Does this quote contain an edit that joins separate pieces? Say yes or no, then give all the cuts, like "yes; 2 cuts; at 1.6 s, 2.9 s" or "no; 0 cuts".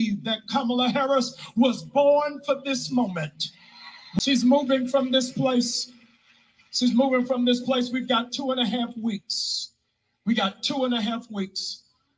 yes; 1 cut; at 4.2 s